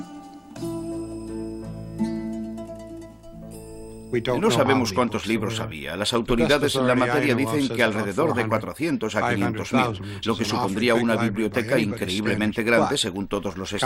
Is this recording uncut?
yes; 0 cuts

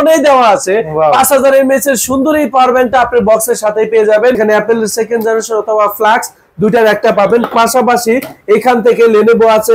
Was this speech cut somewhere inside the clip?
yes; 1 cut; at 4.4 s

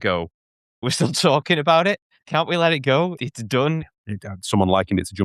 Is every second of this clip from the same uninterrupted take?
no; 4 cuts; at 0.8 s, 2.2 s, 3.2 s, 4.0 s

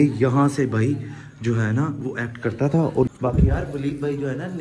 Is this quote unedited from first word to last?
no; 1 cut; at 3.1 s

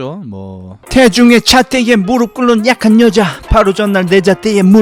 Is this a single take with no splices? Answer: yes; 0 cuts

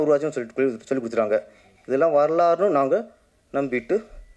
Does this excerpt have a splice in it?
no; 0 cuts

